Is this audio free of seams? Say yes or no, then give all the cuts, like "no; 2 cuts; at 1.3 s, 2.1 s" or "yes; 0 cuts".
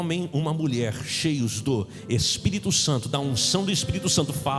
yes; 0 cuts